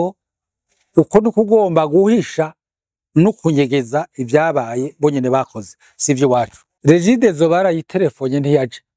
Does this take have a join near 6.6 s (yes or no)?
yes